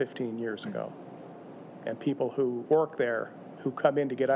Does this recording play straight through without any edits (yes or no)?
no